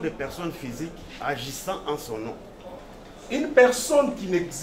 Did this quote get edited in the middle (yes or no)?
yes